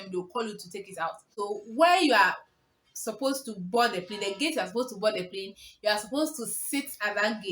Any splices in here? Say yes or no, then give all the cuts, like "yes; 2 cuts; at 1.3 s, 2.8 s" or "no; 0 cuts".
yes; 1 cut; at 1.3 s